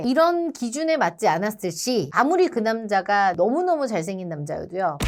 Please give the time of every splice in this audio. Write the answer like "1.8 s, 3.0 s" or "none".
none